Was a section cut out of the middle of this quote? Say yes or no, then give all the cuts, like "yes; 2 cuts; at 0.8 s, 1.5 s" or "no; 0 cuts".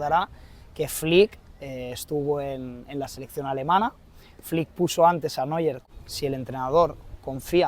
yes; 1 cut; at 5.9 s